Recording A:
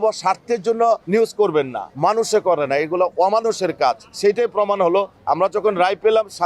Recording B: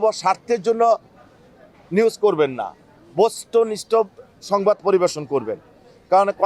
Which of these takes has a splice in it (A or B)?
A